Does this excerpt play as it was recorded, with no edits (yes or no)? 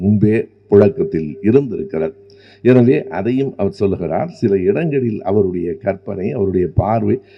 yes